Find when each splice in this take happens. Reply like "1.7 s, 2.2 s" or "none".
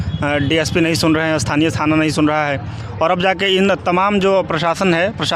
none